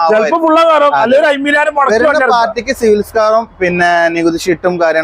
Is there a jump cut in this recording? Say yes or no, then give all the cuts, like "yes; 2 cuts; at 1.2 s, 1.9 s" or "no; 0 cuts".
no; 0 cuts